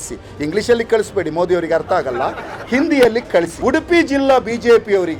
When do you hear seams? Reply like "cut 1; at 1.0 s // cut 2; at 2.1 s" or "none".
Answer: cut 1; at 3.5 s